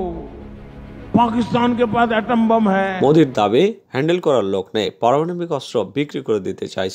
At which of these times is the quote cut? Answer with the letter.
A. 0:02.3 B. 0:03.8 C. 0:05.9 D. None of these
D